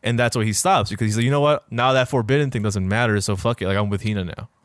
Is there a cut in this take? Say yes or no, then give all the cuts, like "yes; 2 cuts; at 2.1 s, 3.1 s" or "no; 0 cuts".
no; 0 cuts